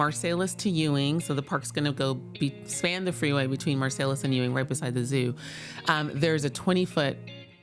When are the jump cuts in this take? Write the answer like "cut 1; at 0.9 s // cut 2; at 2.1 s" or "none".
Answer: none